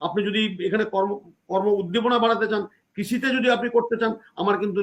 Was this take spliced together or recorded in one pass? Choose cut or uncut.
uncut